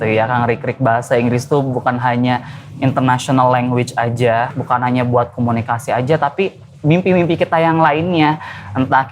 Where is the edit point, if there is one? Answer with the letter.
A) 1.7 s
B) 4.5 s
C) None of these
B